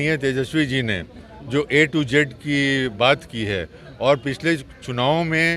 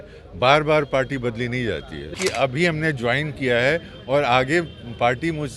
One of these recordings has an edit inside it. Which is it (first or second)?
second